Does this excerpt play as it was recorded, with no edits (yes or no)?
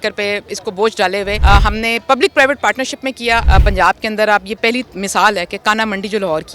no